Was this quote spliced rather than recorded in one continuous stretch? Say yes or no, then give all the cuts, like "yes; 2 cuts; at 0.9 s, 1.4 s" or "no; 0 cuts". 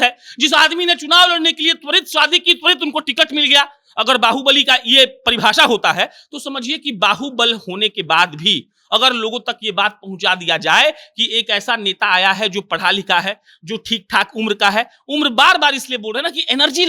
no; 0 cuts